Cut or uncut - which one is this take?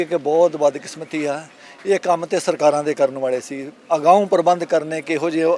uncut